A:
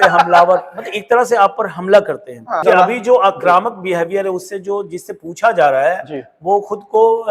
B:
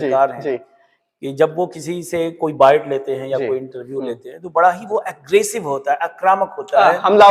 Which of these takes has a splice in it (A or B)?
A